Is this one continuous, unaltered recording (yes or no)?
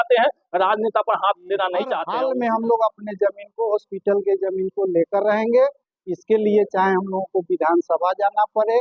no